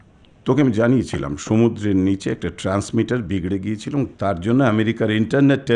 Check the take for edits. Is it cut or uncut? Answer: uncut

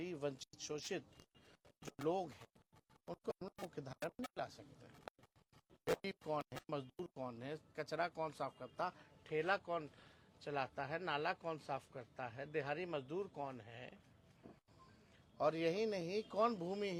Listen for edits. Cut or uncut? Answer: uncut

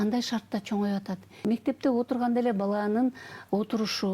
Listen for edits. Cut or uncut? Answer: cut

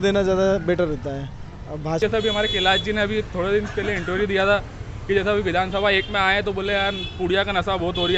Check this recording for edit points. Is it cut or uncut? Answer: cut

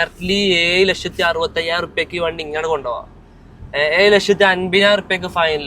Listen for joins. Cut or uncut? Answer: uncut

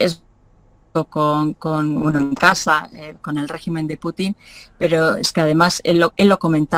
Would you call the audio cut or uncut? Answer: uncut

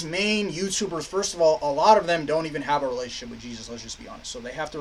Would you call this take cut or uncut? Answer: uncut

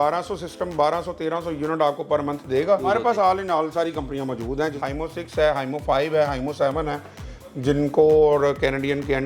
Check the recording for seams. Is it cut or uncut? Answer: cut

